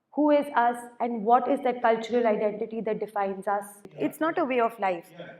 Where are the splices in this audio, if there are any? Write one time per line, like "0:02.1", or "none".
0:03.8